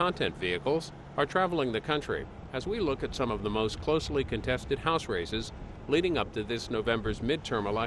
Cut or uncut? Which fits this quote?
uncut